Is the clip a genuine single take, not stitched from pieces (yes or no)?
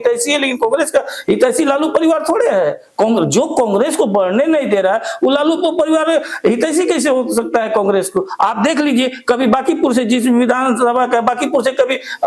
yes